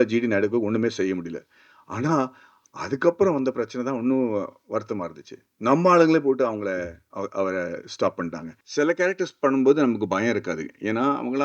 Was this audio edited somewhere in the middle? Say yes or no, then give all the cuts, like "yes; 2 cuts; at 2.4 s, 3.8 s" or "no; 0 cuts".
yes; 1 cut; at 8.5 s